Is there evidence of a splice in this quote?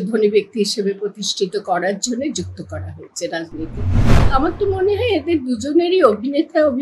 yes; 1 cut; at 4.3 s

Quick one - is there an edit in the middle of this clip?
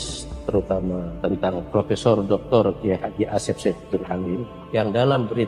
yes; 2 cuts; at 1.1 s, 4.5 s

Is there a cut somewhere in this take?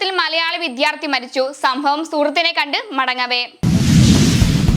yes; 1 cut; at 3.5 s

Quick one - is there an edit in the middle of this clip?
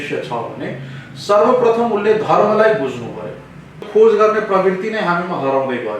yes; 1 cut; at 3.9 s

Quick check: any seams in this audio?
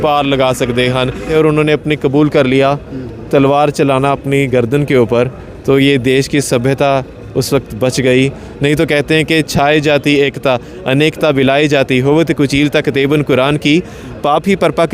yes; 1 cut; at 1.3 s

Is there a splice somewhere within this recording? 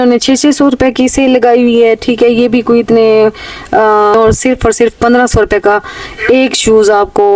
yes; 1 cut; at 4.1 s

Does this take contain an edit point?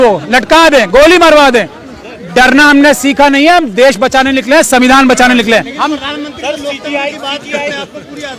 no; 0 cuts

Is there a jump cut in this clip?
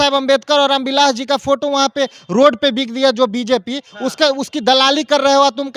no; 0 cuts

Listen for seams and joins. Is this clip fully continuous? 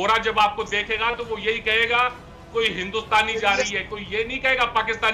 yes; 0 cuts

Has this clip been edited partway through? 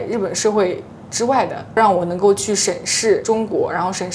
no; 0 cuts

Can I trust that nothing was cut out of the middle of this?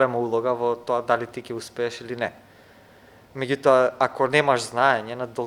yes; 0 cuts

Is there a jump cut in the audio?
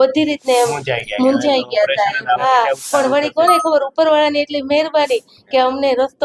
yes; 1 cut; at 2.4 s

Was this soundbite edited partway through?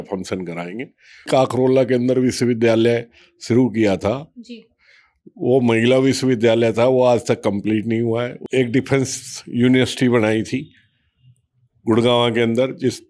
yes; 2 cuts; at 1.3 s, 8.4 s

